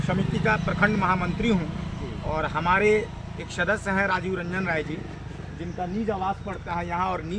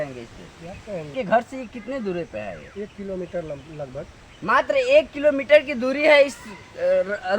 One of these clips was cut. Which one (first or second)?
second